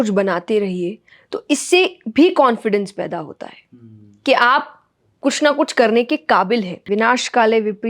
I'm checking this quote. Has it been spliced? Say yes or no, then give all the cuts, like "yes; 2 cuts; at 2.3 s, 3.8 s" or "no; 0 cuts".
yes; 1 cut; at 6.9 s